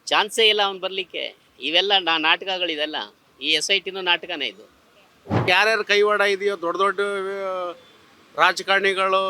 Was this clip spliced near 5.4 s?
yes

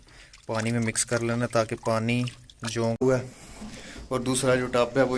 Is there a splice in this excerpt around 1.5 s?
no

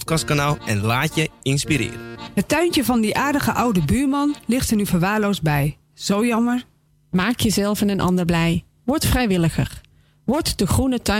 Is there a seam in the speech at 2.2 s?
yes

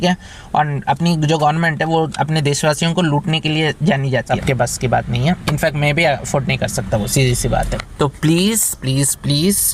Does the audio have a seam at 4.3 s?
yes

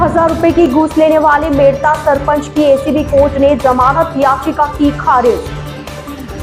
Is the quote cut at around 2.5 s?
no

